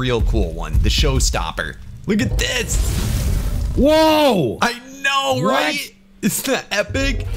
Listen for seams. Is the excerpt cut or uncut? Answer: uncut